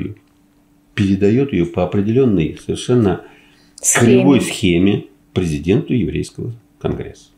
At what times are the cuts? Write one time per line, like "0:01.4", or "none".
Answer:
0:05.2